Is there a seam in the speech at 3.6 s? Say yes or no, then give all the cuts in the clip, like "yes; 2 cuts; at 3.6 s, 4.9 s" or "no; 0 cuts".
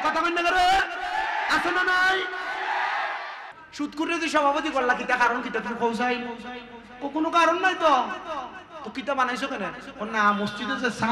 yes; 1 cut; at 3.6 s